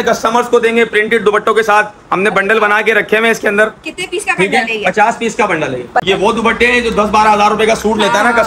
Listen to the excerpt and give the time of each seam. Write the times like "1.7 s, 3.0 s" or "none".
6.0 s